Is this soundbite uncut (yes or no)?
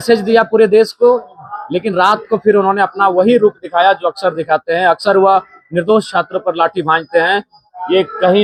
yes